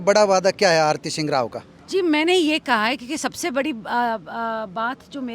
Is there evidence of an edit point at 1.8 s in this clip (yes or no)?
no